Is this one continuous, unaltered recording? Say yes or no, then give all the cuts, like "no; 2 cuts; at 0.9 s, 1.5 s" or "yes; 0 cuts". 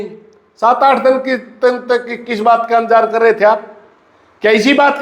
no; 1 cut; at 1.2 s